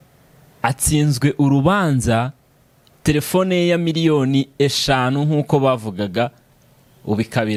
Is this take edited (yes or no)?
no